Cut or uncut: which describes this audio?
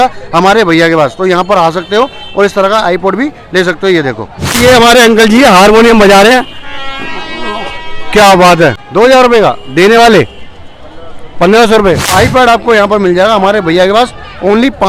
cut